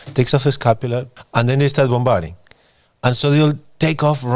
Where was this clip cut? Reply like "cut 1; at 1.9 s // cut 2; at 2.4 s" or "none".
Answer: cut 1; at 1.1 s